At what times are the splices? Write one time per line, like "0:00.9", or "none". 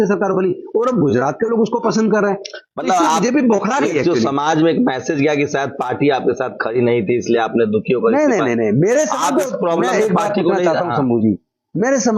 none